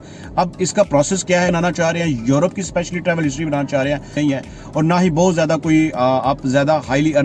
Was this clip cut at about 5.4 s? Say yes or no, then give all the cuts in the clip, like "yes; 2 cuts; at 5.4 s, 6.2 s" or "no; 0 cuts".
no; 2 cuts; at 1.5 s, 4.2 s